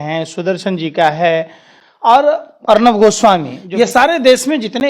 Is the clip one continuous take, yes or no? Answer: no